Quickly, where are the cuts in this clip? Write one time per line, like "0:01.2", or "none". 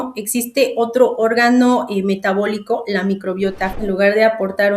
0:03.8